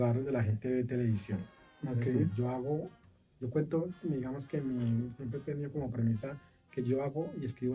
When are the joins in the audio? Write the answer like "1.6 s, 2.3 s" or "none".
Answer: none